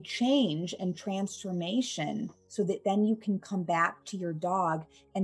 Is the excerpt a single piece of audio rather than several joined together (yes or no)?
no